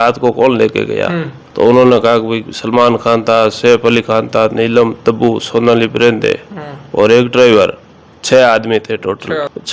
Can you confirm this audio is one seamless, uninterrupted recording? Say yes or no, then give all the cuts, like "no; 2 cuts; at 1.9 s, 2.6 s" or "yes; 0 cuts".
yes; 0 cuts